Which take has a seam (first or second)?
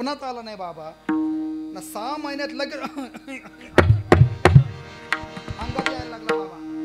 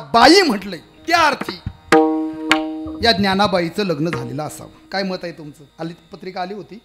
second